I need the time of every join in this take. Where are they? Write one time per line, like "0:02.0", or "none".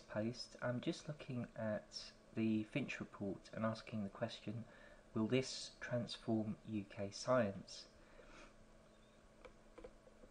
0:08.3